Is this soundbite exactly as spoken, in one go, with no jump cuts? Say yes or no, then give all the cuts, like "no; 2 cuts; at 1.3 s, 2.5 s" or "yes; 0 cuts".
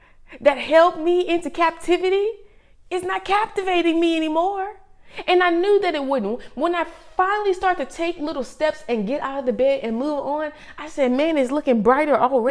yes; 0 cuts